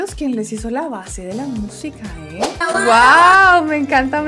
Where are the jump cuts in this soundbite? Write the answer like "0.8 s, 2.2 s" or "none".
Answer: 2.6 s